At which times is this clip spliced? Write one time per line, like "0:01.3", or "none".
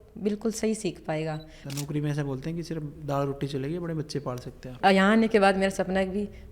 0:01.6
0:04.7